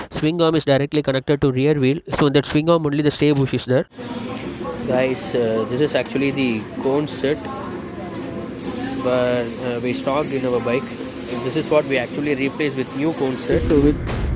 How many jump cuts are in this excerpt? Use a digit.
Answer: 2